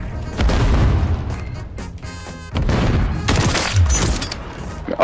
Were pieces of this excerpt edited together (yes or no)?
no